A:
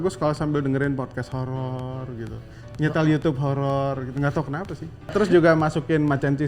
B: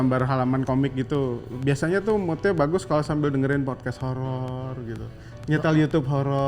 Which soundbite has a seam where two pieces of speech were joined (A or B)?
A